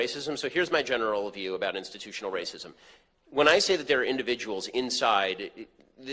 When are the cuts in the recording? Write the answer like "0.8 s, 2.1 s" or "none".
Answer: none